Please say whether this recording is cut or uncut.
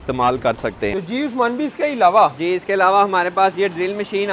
uncut